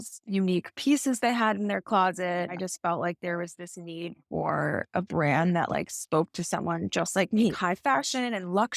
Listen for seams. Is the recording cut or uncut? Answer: cut